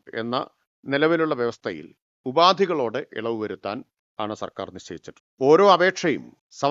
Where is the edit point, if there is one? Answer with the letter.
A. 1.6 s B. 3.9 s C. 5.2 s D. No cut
C